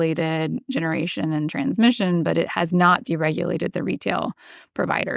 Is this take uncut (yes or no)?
yes